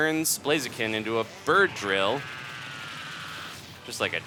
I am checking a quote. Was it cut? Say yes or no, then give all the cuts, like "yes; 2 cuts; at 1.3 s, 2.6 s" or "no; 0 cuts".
no; 0 cuts